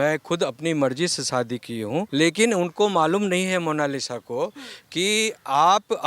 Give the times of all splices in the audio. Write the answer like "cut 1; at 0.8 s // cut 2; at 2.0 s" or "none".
cut 1; at 2.1 s